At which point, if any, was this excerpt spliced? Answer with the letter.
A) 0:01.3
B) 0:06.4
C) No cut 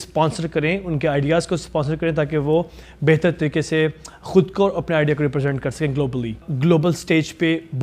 B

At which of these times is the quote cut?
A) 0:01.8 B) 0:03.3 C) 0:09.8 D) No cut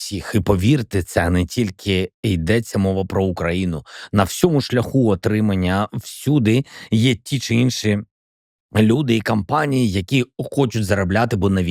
D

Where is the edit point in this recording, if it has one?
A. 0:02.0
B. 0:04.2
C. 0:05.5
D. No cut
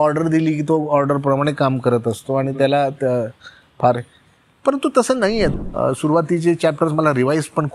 C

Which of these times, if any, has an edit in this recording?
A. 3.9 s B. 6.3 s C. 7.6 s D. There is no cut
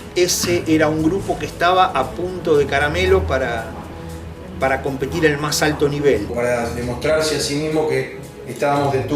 B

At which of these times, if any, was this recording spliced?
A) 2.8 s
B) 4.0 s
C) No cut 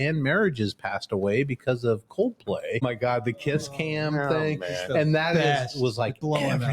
A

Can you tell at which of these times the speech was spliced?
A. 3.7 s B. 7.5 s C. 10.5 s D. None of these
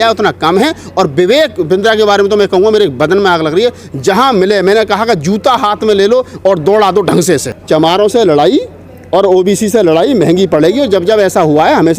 B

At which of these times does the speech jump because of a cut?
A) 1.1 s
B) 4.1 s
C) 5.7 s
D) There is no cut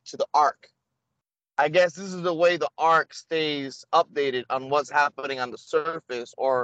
D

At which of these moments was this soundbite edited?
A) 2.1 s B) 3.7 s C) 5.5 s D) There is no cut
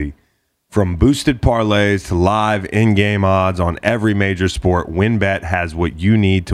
D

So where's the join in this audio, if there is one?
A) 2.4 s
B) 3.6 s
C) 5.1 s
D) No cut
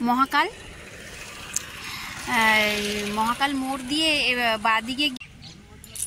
C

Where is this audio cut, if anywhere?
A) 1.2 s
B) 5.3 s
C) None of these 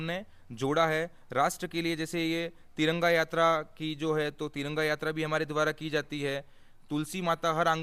C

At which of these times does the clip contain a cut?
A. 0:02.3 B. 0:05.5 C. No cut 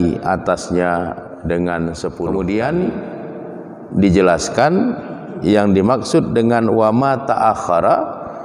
A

